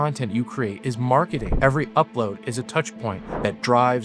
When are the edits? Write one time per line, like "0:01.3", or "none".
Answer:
0:01.4